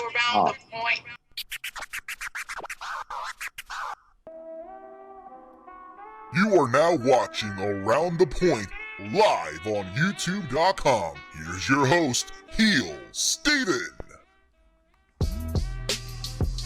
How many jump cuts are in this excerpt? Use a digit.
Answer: 1